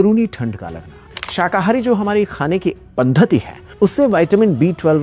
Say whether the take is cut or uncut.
cut